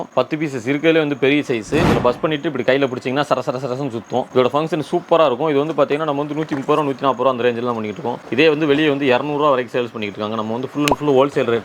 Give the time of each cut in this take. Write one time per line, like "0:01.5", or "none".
0:01.9